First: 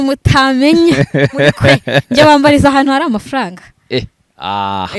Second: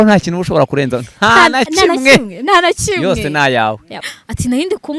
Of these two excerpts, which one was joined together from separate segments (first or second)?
second